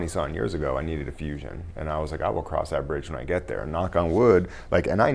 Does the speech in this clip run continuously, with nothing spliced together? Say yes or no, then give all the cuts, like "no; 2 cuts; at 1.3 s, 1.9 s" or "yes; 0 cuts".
yes; 0 cuts